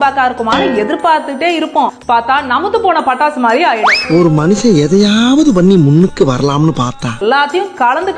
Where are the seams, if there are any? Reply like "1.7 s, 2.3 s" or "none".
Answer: 7.2 s